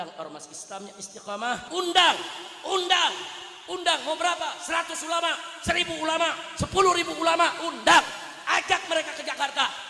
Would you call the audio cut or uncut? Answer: cut